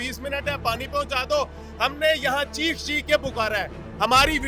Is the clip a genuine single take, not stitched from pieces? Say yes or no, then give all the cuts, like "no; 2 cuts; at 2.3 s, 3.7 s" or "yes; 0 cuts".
yes; 0 cuts